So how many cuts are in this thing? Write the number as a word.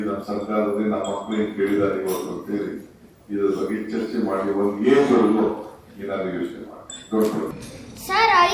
one